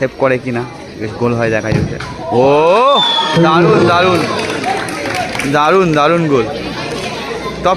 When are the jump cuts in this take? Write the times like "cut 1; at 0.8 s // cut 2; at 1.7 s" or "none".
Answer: none